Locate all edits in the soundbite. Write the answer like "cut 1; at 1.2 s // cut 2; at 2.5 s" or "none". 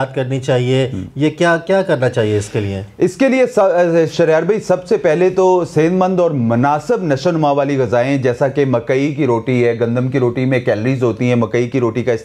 none